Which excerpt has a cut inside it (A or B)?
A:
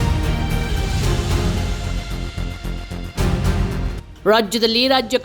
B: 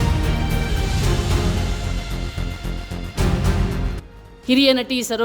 B